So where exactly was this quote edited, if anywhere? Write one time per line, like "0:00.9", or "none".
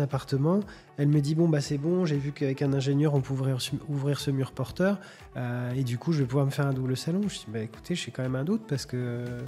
none